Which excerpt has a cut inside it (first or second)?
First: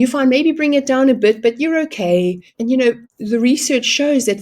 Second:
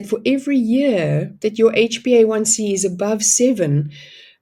first